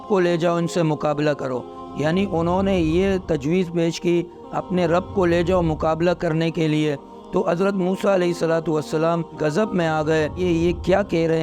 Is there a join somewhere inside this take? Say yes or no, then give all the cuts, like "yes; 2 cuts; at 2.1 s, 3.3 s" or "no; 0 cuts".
no; 0 cuts